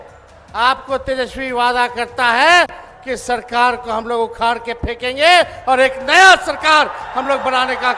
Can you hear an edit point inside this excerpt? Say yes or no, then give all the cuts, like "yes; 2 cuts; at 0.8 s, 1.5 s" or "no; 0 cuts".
no; 0 cuts